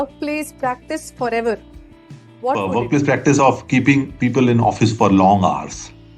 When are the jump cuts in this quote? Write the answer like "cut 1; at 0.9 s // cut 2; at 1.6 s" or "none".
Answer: cut 1; at 2.6 s